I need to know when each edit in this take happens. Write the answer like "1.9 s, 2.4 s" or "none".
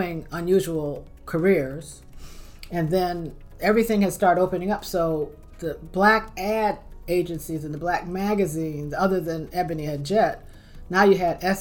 9.8 s